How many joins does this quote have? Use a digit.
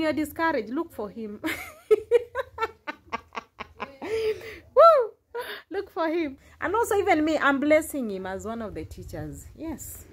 1